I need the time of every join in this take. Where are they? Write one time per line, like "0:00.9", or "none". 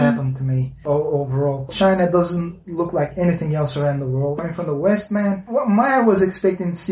0:00.8
0:01.7
0:04.4
0:05.4